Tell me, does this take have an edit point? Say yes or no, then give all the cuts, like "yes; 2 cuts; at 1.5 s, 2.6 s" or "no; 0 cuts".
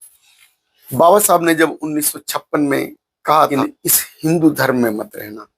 yes; 1 cut; at 3.5 s